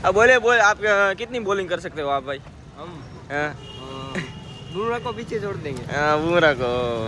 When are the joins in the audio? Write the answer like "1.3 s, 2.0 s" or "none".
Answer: 5.8 s

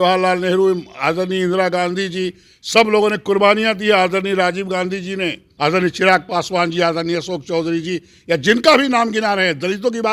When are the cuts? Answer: 5.4 s

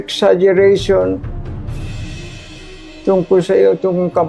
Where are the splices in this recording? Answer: none

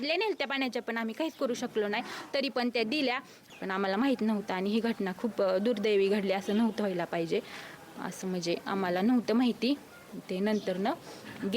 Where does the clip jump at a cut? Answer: 3.4 s

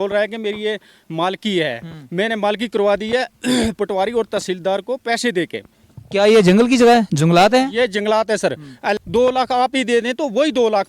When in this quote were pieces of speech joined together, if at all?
9.0 s

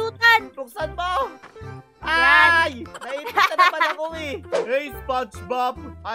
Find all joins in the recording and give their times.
4.4 s

